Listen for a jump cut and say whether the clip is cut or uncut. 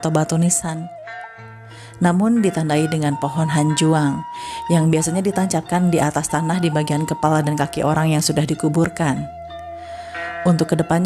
uncut